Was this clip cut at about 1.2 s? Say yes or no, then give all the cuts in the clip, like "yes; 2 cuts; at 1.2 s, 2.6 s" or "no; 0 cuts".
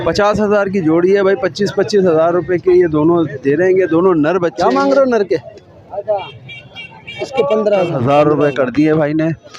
no; 2 cuts; at 4.6 s, 8.0 s